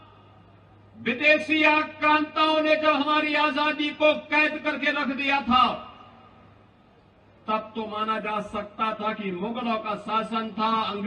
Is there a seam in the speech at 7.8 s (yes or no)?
no